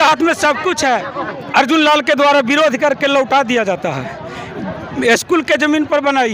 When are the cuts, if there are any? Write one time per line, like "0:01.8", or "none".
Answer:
0:01.1